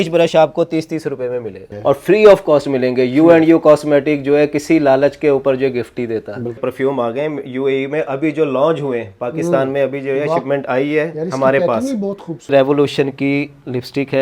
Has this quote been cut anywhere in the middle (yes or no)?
yes